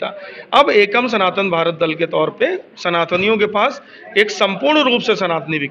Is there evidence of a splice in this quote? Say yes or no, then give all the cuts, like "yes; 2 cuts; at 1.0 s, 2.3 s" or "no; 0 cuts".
no; 0 cuts